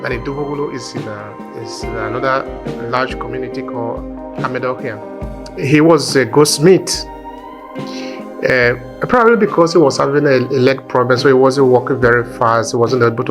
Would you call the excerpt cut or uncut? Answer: cut